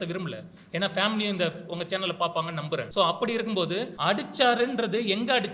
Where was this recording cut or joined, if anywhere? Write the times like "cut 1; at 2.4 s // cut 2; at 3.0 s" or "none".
cut 1; at 2.9 s // cut 2; at 3.9 s